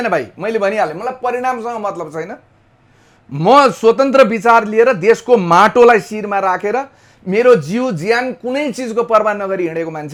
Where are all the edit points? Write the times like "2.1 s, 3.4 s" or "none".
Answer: none